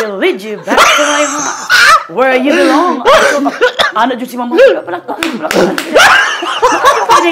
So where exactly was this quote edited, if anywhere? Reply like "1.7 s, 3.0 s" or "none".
none